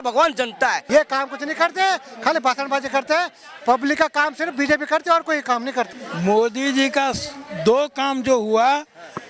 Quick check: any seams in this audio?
yes; 2 cuts; at 0.8 s, 5.9 s

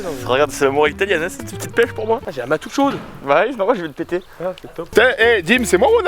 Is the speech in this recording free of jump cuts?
yes; 0 cuts

